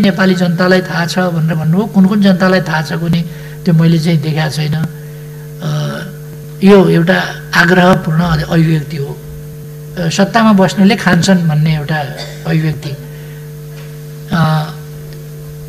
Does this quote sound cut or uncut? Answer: uncut